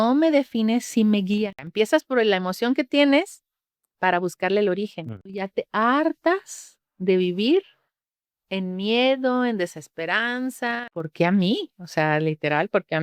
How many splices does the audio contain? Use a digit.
3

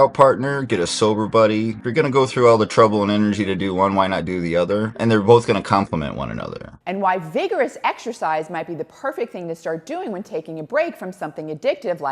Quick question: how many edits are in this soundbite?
2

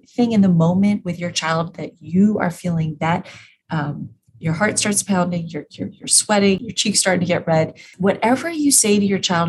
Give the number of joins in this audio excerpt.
2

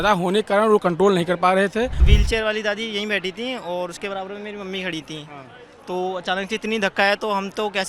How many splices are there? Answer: 1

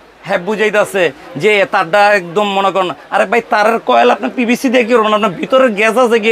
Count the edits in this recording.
0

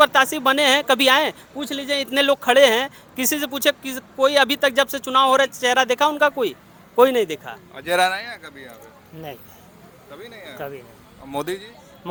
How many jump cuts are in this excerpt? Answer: 0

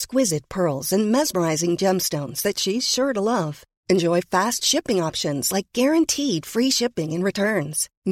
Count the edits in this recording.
0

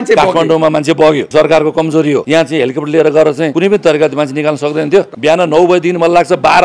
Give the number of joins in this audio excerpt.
4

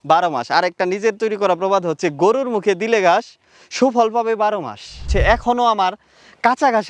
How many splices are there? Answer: 1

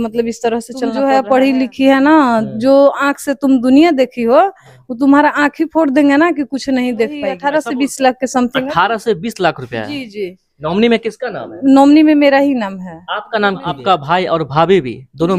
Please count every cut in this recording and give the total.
3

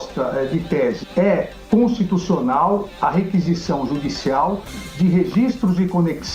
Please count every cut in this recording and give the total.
1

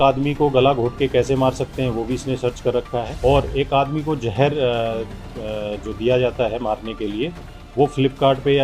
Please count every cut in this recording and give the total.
1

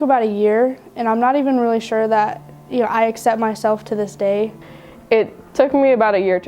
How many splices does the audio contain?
1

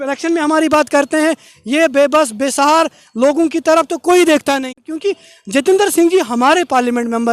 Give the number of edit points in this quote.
1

